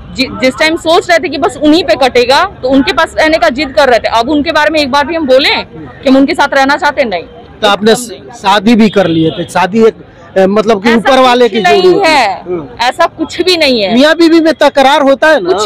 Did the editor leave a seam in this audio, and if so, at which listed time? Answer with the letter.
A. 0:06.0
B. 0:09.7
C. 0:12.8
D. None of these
D